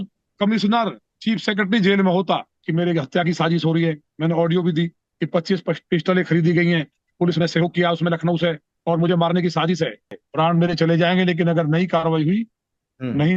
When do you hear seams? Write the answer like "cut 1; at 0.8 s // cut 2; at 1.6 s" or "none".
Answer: cut 1; at 2.6 s // cut 2; at 10.1 s